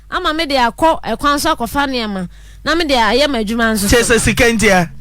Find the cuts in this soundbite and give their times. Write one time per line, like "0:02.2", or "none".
none